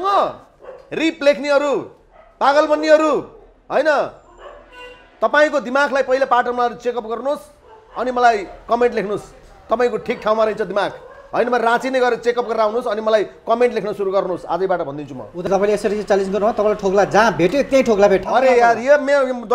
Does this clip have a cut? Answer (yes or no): yes